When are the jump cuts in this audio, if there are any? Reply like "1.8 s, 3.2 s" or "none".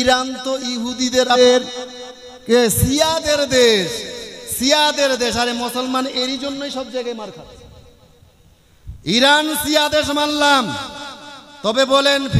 1.4 s